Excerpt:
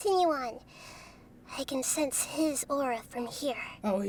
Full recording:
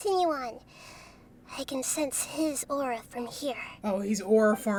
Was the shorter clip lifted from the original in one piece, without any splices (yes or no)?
yes